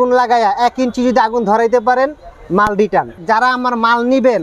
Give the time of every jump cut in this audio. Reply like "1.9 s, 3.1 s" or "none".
3.2 s